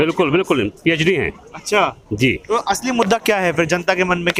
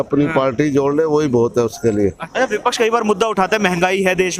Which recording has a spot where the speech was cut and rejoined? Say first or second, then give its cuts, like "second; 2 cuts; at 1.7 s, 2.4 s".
second; 1 cut; at 2.2 s